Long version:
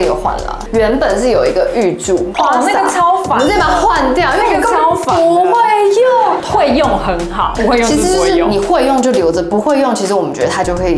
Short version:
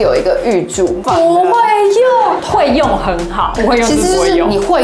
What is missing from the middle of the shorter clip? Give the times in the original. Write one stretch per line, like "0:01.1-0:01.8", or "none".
0:02.3-0:05.0